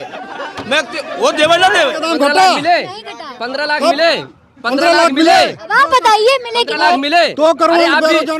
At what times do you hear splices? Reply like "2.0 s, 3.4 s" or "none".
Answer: 2.0 s